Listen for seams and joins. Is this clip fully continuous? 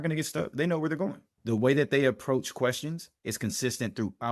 no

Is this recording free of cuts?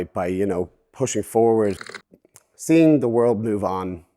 no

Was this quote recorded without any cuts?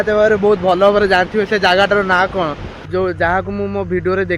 no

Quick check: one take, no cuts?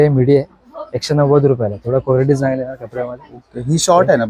yes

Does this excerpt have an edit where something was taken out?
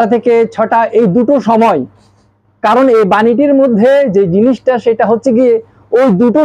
no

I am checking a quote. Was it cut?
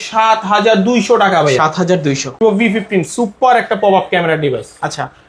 yes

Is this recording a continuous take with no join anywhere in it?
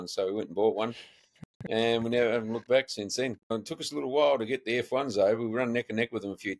no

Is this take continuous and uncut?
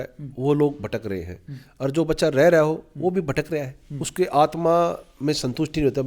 yes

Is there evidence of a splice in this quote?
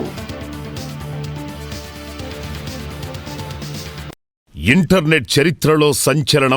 yes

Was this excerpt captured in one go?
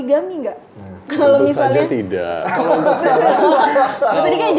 yes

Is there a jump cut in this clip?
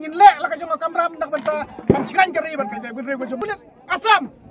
yes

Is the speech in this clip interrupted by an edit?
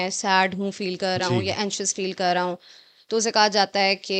no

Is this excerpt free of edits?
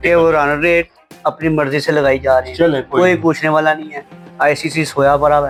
yes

